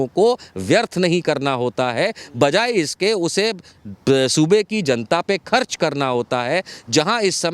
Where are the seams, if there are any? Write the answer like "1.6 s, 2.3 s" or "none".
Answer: none